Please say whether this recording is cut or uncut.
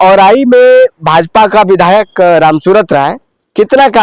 uncut